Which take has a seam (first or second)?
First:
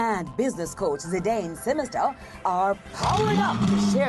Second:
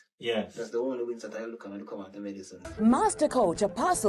second